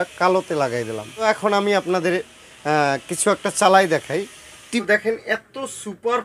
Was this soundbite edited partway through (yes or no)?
yes